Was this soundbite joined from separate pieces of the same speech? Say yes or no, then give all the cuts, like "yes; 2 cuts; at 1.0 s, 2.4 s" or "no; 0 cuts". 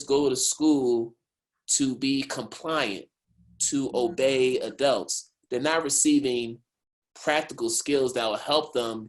no; 0 cuts